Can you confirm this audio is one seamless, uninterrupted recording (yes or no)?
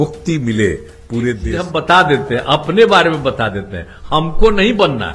no